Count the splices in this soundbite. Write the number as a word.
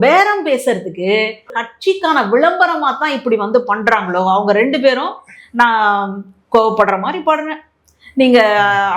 one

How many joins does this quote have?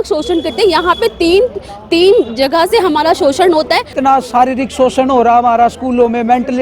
one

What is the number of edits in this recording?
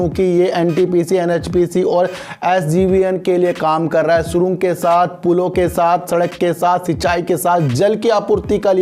zero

